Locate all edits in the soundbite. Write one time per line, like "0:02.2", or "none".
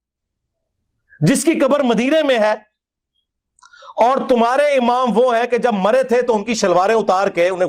none